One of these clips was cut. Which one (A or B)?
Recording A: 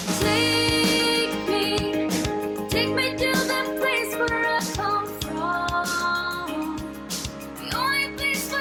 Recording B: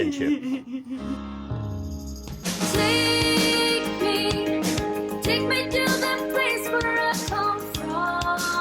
B